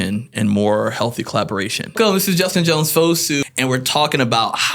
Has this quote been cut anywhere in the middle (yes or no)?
yes